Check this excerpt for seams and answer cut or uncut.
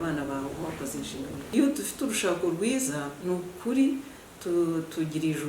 cut